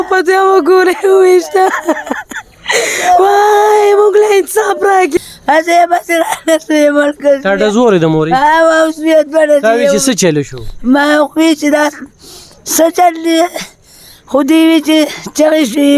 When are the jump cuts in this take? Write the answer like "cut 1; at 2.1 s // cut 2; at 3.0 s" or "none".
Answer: cut 1; at 5.2 s

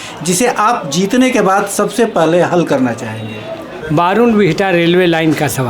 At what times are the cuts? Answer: cut 1; at 3.7 s

